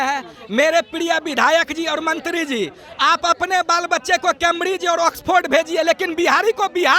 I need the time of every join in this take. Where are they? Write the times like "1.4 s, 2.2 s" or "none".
none